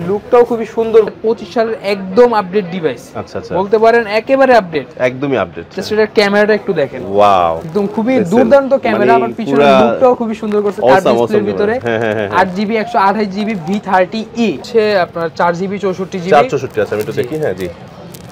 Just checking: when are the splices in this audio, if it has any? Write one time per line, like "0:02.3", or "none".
0:01.1
0:07.7
0:14.6